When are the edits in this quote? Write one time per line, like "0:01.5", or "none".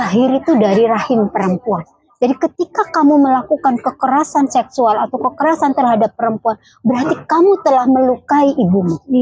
none